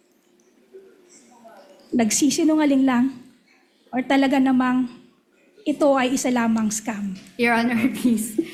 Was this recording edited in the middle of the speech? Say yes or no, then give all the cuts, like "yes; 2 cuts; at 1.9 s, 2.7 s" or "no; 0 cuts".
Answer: no; 0 cuts